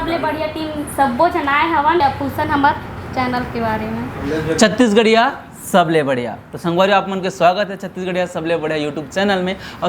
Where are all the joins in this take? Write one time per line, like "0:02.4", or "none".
0:02.0